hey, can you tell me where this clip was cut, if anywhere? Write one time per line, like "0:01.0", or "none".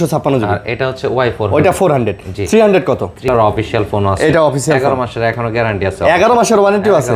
0:03.3